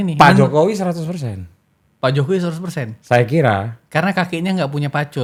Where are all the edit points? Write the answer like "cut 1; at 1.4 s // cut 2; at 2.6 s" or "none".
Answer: none